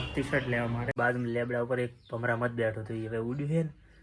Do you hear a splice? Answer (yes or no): yes